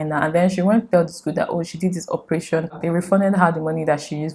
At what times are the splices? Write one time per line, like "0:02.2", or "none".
0:02.8